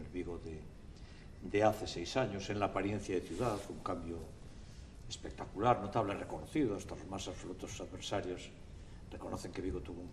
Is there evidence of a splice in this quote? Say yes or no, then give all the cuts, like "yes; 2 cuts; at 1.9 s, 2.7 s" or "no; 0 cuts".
yes; 1 cut; at 8.0 s